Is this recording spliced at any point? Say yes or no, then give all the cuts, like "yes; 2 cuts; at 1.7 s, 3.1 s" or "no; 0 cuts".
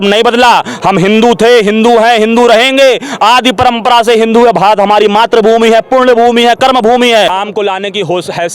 yes; 1 cut; at 7.4 s